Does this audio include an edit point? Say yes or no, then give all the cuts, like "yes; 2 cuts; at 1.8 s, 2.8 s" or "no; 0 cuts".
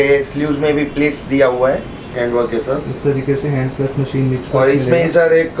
yes; 1 cut; at 2.1 s